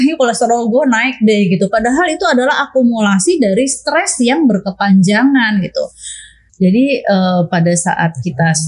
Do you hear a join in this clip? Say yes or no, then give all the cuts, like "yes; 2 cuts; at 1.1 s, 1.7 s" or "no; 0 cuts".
no; 0 cuts